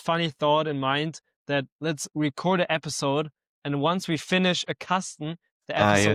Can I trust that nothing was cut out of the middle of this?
yes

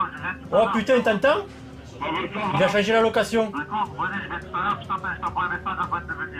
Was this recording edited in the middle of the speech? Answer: yes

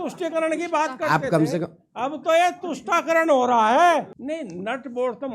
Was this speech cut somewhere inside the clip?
yes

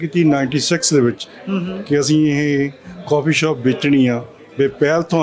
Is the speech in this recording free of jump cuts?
yes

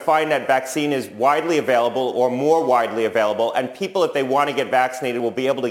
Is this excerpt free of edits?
yes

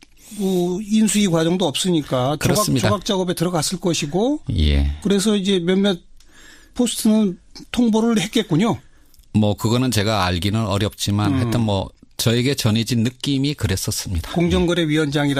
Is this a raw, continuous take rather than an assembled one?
no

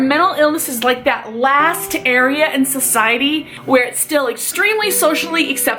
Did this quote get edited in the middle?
no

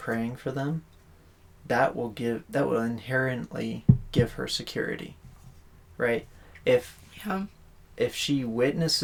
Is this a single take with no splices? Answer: yes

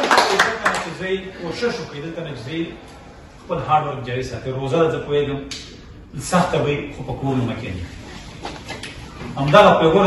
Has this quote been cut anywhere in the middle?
no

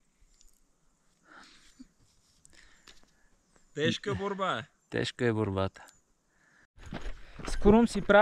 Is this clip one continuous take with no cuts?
no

